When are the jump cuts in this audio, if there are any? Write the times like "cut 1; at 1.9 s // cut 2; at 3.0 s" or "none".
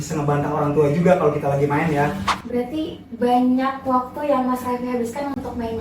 cut 1; at 2.3 s